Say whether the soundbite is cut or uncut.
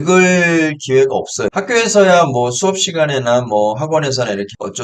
uncut